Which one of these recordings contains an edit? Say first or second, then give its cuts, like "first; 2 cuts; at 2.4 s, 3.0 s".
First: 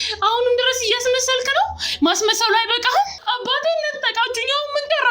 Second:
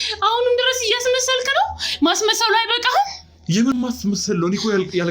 first; 1 cut; at 3.2 s